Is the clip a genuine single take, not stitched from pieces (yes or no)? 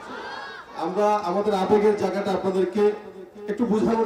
yes